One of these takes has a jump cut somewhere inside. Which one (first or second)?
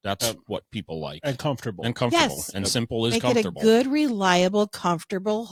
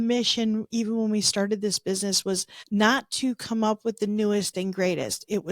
second